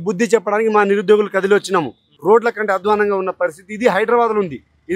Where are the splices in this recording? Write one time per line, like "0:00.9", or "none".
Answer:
0:02.1